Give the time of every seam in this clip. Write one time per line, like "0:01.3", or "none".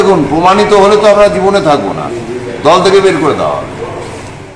none